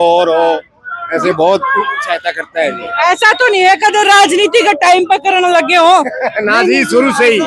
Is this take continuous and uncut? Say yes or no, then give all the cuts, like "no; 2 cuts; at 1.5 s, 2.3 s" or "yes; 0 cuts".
yes; 0 cuts